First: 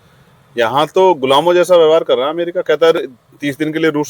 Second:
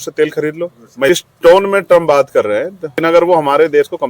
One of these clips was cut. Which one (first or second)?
second